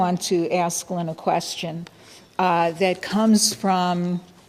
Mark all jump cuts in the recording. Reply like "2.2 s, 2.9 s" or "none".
none